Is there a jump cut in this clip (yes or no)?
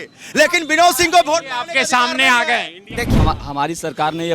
yes